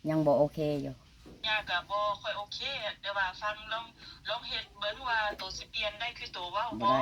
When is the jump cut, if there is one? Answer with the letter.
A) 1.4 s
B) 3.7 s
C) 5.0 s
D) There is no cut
A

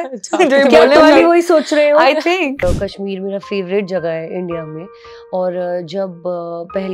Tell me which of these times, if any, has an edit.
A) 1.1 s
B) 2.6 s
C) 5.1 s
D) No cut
B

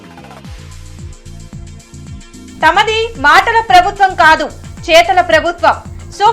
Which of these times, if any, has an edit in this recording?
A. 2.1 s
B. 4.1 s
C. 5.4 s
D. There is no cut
A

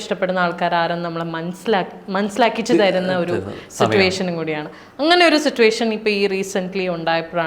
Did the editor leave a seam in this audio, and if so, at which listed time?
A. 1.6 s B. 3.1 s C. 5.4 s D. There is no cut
D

